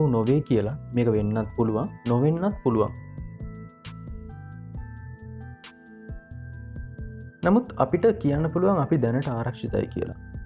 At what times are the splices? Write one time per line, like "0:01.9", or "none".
0:03.5
0:07.4